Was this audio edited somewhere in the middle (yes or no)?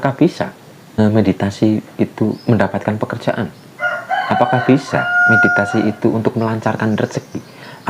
yes